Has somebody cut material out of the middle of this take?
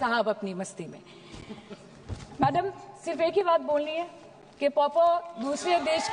no; 0 cuts

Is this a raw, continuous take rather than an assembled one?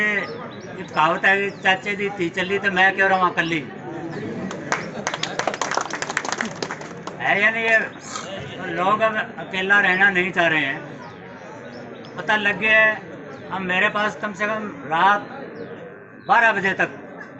yes; 0 cuts

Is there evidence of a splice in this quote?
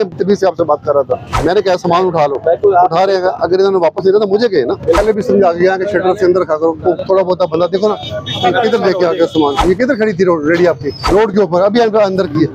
yes; 4 cuts; at 1.3 s, 5.0 s, 9.6 s, 11.0 s

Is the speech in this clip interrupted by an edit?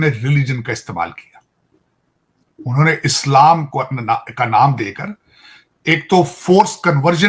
no; 0 cuts

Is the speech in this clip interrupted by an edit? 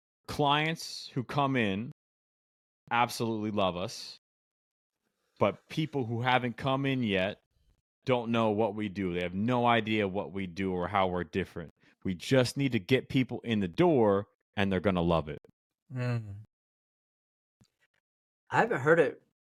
no; 0 cuts

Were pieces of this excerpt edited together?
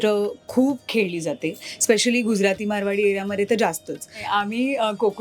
yes; 1 cut; at 4.2 s

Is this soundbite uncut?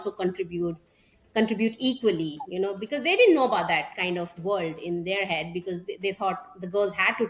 yes; 0 cuts

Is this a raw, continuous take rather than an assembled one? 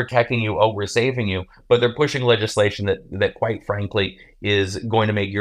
yes; 0 cuts

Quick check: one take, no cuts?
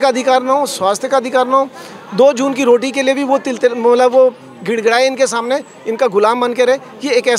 yes; 0 cuts

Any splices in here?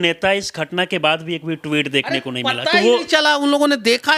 no; 0 cuts

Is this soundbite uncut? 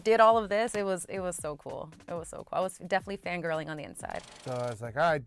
no; 1 cut; at 4.3 s

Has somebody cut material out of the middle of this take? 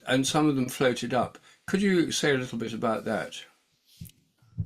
no; 0 cuts

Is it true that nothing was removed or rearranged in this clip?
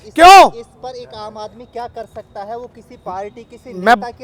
yes; 0 cuts

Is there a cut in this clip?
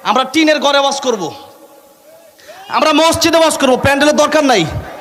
no; 0 cuts

